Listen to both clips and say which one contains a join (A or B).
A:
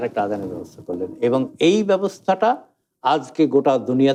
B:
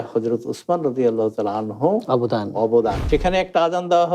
B